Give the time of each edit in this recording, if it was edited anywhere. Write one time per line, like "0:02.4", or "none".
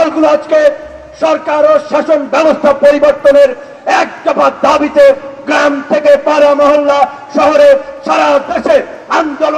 none